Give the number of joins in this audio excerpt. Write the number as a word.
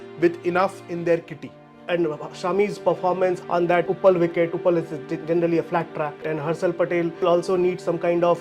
four